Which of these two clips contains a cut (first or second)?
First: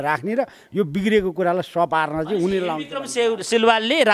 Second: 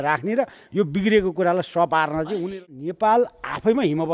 second